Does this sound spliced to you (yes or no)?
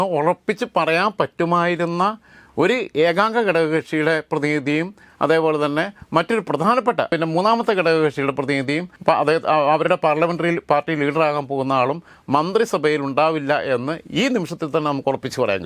yes